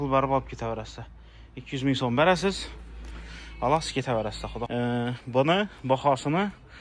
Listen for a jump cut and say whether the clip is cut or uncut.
cut